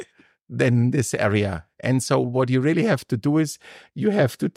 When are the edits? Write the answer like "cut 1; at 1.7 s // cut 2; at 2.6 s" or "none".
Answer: none

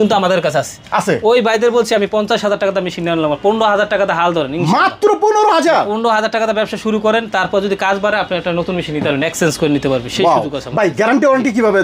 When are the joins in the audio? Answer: none

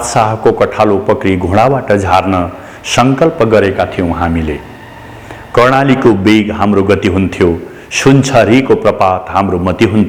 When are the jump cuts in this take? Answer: none

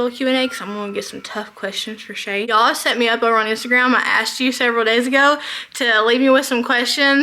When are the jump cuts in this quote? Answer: cut 1; at 2.5 s

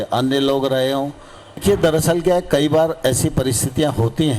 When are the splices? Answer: cut 1; at 1.6 s

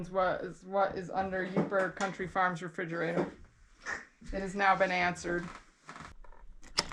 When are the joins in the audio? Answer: none

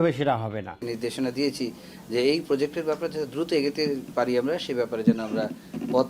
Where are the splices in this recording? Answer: cut 1; at 0.9 s

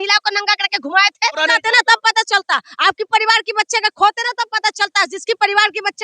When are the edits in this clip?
cut 1; at 1.4 s

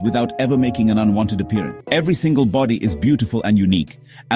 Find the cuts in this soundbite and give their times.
cut 1; at 1.8 s

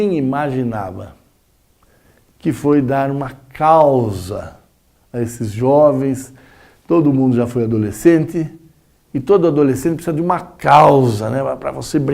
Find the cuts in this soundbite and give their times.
cut 1; at 5.1 s

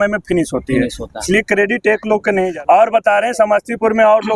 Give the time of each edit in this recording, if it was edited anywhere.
cut 1; at 2.5 s

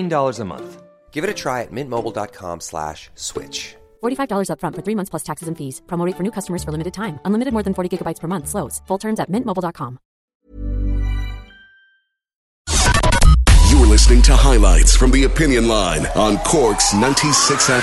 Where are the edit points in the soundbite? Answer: cut 1; at 12.5 s

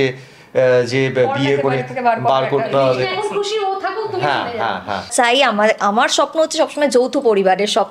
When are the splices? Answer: cut 1; at 5.1 s

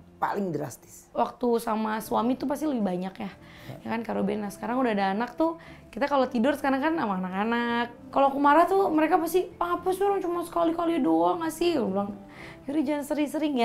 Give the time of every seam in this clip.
cut 1; at 1.0 s // cut 2; at 8.0 s

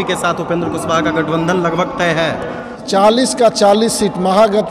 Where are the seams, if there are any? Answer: cut 1; at 2.8 s

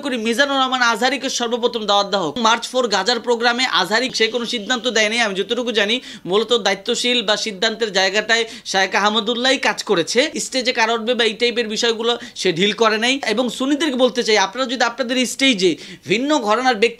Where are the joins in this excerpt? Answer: cut 1; at 2.4 s // cut 2; at 4.1 s // cut 3; at 10.4 s // cut 4; at 13.3 s

